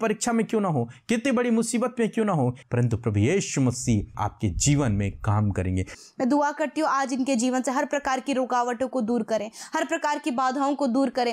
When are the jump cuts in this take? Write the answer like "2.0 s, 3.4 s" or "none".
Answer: 2.6 s, 4.1 s, 5.9 s